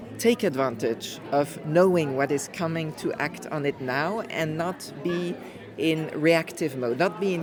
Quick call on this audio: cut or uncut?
uncut